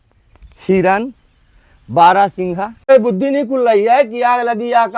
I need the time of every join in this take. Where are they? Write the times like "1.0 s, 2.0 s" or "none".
2.9 s